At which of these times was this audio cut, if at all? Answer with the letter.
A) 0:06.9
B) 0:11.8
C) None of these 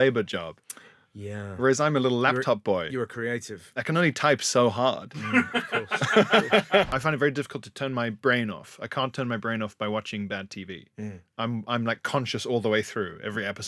A